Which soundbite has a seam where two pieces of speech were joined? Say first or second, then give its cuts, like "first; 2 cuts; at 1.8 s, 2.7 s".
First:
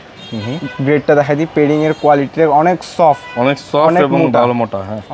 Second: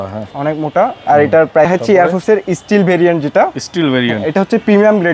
second; 1 cut; at 1.7 s